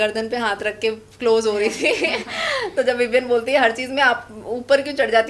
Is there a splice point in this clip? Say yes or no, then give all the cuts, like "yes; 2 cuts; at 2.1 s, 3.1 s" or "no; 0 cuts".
no; 0 cuts